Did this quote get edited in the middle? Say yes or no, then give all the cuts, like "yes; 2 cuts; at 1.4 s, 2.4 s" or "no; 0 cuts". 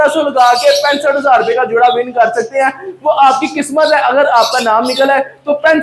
no; 0 cuts